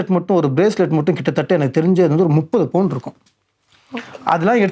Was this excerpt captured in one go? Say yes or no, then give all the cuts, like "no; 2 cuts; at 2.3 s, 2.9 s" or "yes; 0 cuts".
yes; 0 cuts